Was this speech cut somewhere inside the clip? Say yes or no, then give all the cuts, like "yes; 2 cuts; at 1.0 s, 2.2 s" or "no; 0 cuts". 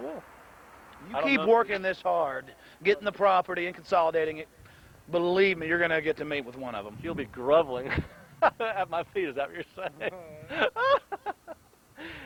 no; 0 cuts